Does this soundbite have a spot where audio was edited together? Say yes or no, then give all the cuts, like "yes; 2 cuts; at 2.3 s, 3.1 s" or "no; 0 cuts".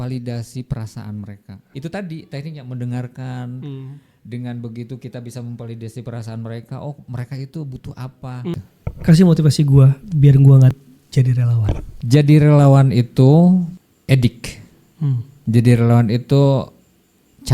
yes; 2 cuts; at 1.7 s, 8.5 s